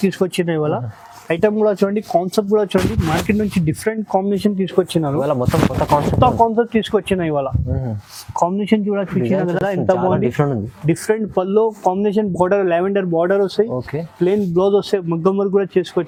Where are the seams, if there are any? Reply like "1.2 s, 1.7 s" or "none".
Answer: none

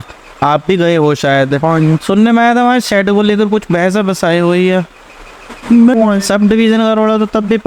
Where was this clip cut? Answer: 5.9 s

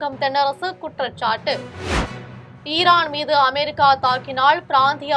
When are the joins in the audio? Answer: 2.1 s

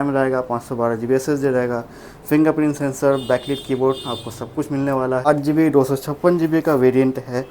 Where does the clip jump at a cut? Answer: 5.3 s

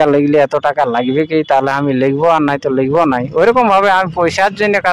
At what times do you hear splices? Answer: none

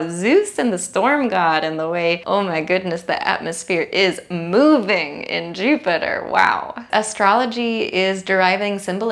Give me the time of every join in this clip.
2.2 s, 6.8 s

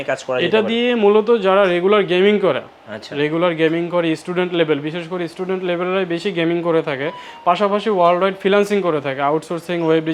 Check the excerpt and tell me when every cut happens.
none

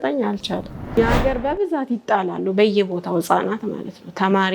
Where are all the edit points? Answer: 1.0 s

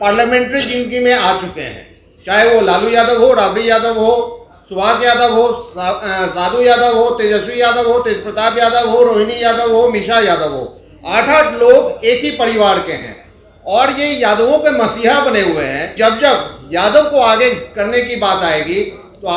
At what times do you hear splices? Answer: 15.9 s

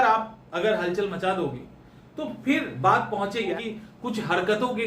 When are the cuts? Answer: 3.5 s

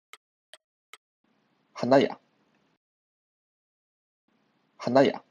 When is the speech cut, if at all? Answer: none

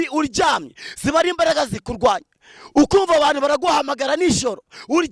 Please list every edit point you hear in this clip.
none

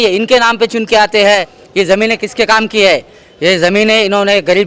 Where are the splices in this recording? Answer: 1.6 s

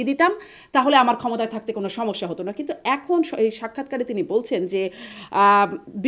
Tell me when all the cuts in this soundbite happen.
none

